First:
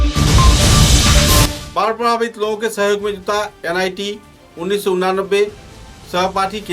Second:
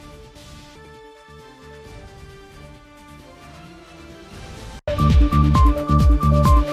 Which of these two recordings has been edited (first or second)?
first